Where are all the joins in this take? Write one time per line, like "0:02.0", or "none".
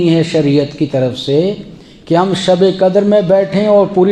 none